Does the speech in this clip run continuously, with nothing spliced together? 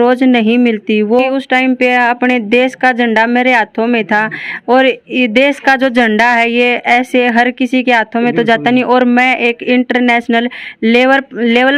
no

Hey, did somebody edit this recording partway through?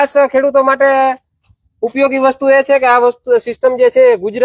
no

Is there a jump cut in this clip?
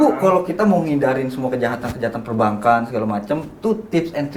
no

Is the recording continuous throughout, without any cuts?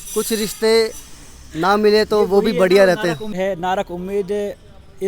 no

